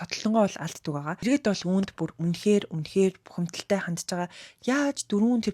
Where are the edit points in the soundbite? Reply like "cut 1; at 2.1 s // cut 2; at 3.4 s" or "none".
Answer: cut 1; at 1.2 s